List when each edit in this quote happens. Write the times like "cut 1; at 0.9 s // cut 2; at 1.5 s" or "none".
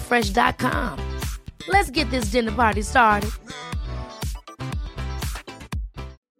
none